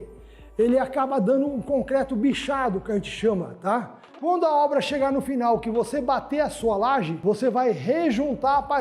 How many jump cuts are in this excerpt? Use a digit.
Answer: 1